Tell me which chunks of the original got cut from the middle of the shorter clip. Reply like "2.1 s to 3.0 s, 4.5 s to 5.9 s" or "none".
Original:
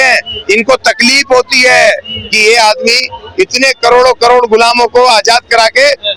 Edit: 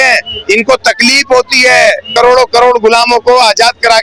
2.1 s to 3.8 s

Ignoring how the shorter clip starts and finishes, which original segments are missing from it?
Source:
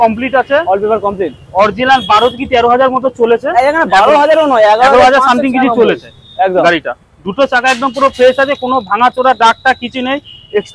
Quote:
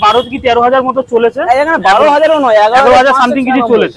none

